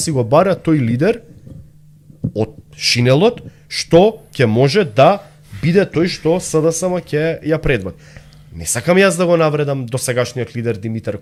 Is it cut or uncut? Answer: uncut